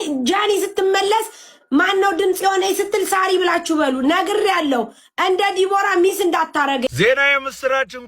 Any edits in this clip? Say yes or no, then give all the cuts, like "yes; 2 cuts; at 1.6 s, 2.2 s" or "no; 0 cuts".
yes; 1 cut; at 6.9 s